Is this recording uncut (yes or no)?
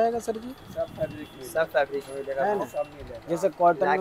yes